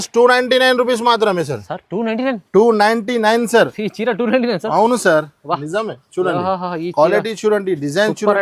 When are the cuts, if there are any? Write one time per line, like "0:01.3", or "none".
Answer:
none